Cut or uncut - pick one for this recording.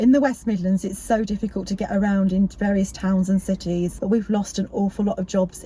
cut